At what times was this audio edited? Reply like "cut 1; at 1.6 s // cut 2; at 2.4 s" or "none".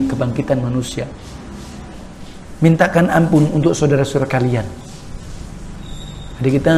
cut 1; at 1.9 s